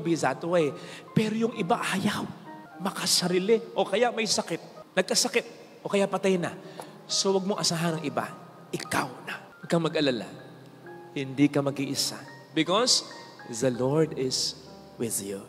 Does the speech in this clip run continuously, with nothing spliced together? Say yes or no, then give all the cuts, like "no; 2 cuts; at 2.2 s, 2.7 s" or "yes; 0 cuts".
yes; 0 cuts